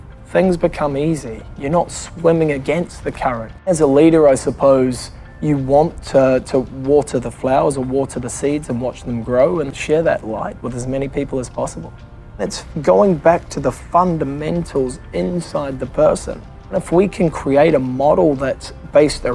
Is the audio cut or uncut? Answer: cut